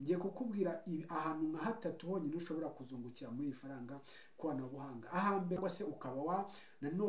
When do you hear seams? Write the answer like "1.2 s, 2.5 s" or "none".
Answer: 5.6 s